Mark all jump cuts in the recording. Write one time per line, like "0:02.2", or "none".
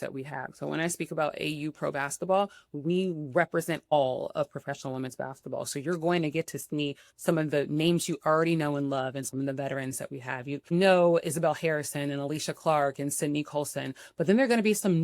0:03.9
0:10.7